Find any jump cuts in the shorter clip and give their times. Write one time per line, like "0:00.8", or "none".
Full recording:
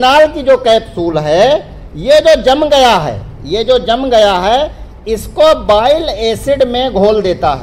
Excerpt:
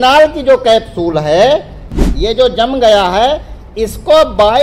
0:01.9